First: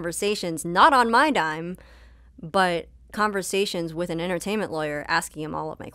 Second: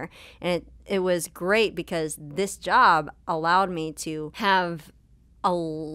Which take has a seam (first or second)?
second